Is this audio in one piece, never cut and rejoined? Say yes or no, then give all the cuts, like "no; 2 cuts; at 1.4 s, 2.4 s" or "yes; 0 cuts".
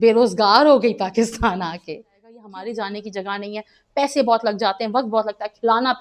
no; 1 cut; at 2.4 s